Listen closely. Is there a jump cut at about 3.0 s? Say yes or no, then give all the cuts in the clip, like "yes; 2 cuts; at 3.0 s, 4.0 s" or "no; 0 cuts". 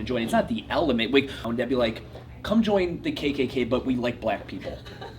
no; 1 cut; at 1.4 s